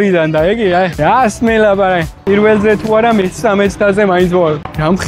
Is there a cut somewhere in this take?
no; 0 cuts

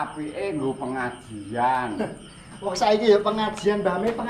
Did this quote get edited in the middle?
no; 0 cuts

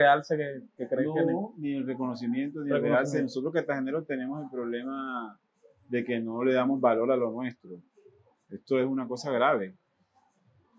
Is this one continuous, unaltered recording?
yes; 0 cuts

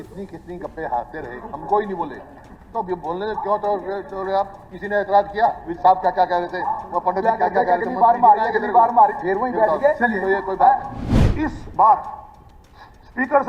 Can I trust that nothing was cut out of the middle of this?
no; 1 cut; at 11.0 s

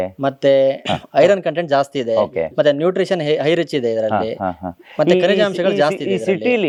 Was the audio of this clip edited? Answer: no; 0 cuts

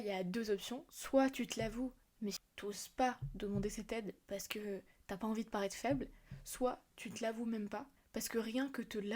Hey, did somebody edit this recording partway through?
yes; 1 cut; at 2.4 s

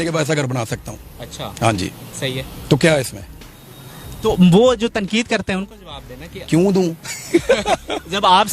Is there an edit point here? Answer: no; 0 cuts

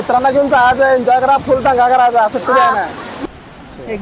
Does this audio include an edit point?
yes; 1 cut; at 3.1 s

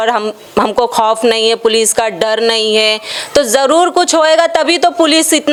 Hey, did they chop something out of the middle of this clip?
no; 0 cuts

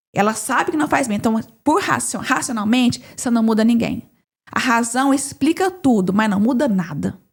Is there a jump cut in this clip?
no; 0 cuts

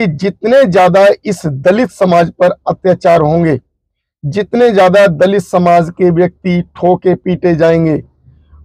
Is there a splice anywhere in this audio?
no; 0 cuts

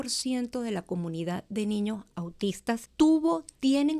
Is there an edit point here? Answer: yes; 1 cut; at 2.9 s

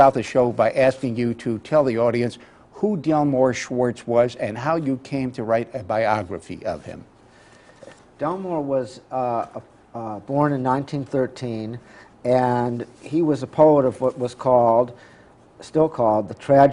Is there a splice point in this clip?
yes; 1 cut; at 1.6 s

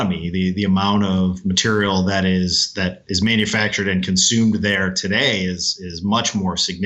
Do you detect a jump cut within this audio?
no; 0 cuts

